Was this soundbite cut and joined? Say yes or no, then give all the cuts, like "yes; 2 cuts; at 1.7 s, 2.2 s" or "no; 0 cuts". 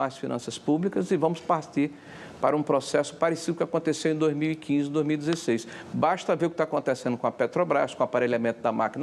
no; 0 cuts